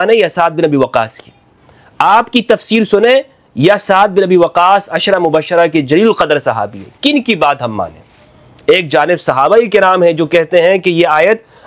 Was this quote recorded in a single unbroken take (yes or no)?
yes